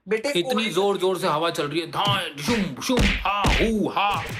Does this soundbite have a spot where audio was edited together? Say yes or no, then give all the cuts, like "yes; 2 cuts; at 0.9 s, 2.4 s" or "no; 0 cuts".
no; 0 cuts